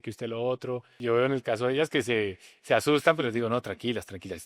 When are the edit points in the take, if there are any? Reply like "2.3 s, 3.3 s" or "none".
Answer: 0.9 s